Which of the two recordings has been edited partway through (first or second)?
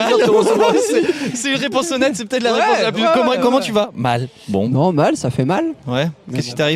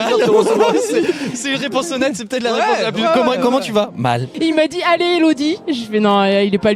second